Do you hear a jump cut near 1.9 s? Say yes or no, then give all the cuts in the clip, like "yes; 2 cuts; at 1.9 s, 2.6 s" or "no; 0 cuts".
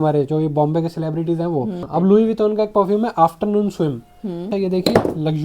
yes; 2 cuts; at 1.9 s, 4.5 s